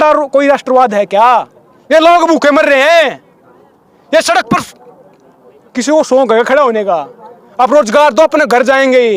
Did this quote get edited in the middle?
no; 0 cuts

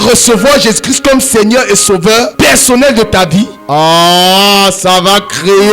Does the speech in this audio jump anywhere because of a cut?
yes; 2 cuts; at 2.3 s, 3.6 s

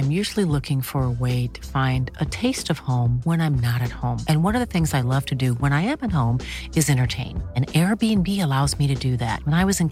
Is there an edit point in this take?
no; 0 cuts

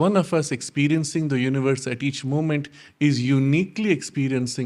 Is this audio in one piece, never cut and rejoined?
yes; 0 cuts

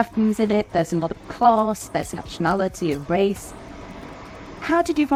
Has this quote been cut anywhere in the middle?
no; 0 cuts

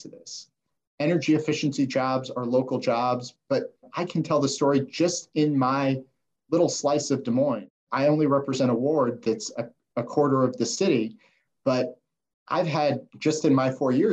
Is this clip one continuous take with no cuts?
no; 1 cut; at 3.8 s

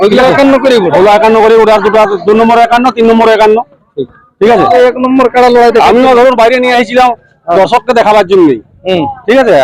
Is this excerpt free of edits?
no; 1 cut; at 4.8 s

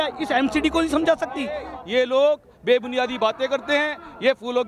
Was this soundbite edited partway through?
yes; 1 cut; at 1.7 s

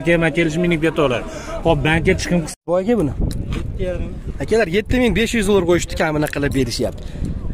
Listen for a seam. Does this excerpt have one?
yes; 1 cut; at 2.6 s

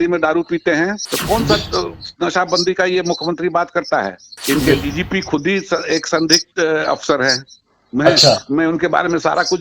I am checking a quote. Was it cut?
yes; 2 cuts; at 1.1 s, 4.3 s

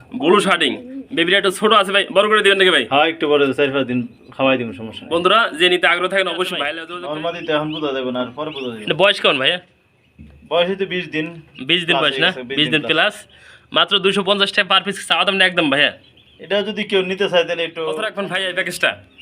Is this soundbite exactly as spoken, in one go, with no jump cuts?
no; 2 cuts; at 6.8 s, 18.1 s

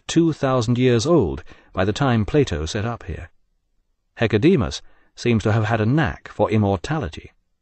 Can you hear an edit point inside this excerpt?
yes; 1 cut; at 2.4 s

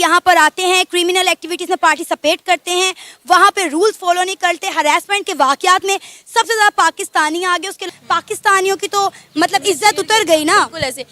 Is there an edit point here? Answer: yes; 1 cut; at 7.8 s

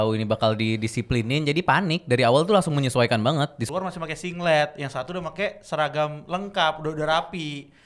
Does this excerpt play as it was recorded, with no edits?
no; 1 cut; at 3.6 s

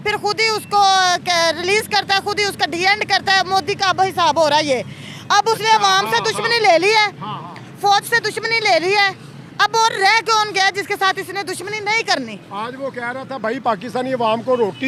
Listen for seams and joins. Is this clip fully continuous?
yes; 0 cuts

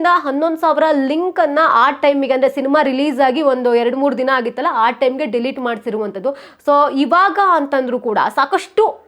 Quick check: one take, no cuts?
yes; 0 cuts

